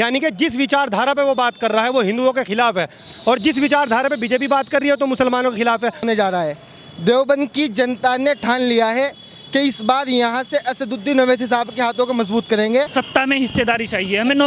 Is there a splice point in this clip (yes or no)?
yes